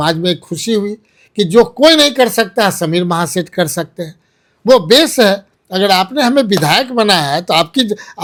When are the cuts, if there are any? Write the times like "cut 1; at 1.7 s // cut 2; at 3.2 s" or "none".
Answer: none